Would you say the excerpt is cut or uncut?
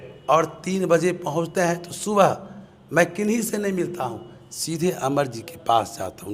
uncut